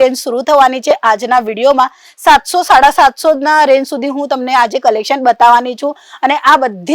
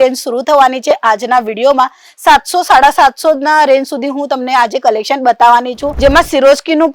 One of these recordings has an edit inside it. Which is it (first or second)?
second